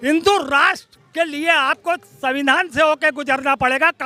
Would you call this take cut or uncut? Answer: uncut